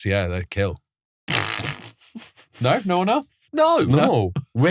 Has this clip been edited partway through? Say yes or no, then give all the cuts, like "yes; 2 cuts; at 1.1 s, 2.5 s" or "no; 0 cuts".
no; 0 cuts